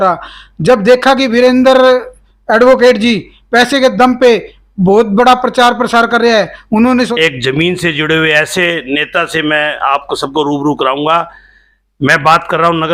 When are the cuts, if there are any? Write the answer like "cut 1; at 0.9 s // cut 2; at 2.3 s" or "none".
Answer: cut 1; at 7.1 s